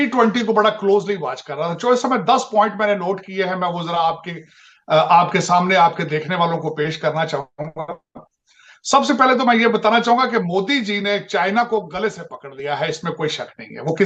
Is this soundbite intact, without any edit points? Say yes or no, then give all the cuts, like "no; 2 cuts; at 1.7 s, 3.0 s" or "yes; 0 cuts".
yes; 0 cuts